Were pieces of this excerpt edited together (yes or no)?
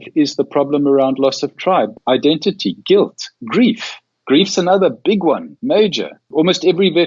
yes